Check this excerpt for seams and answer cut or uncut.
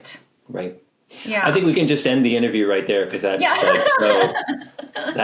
cut